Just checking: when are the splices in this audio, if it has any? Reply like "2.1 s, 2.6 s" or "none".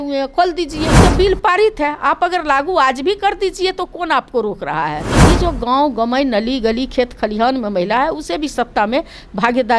1.0 s, 5.2 s